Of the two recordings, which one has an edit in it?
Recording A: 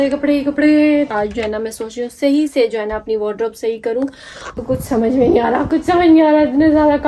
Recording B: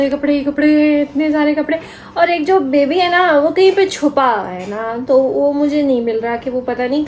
A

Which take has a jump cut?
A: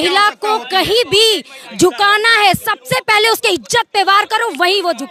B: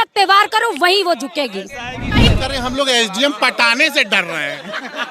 B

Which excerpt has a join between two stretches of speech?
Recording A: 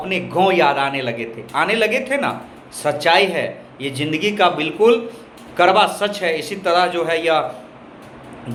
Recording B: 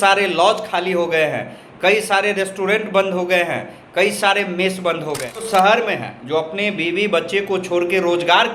B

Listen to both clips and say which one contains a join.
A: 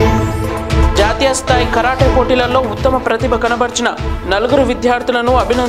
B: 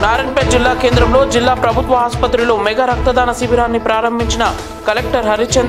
A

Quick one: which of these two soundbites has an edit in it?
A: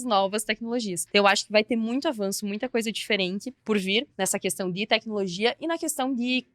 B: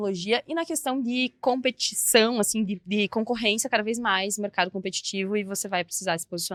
A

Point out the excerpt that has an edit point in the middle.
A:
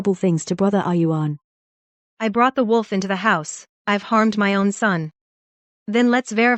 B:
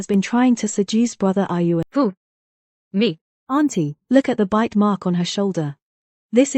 B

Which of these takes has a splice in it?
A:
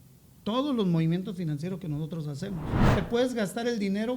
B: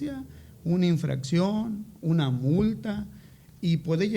A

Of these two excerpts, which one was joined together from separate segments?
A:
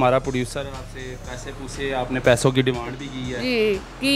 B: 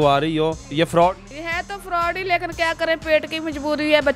B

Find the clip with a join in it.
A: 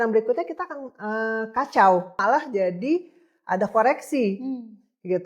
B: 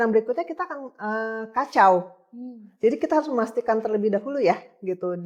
A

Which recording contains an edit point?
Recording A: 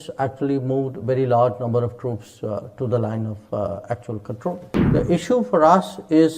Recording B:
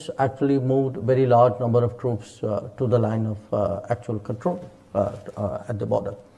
A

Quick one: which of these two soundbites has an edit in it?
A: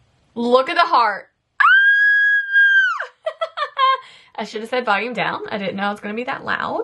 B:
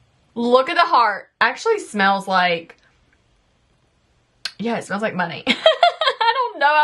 B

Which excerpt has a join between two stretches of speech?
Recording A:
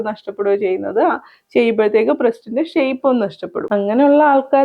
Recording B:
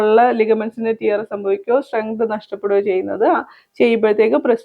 A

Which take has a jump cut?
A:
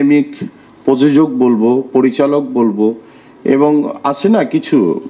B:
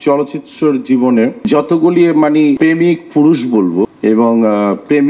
B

